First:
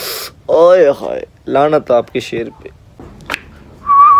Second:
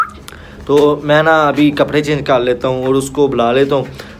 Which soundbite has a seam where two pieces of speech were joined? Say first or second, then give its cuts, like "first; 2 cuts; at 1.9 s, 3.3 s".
first; 1 cut; at 2.8 s